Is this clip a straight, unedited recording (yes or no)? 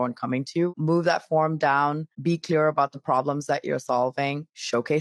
no